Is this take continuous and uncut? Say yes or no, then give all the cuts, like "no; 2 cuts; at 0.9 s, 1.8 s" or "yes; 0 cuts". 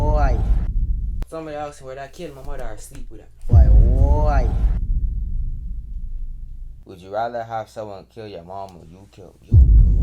no; 2 cuts; at 1.2 s, 6.7 s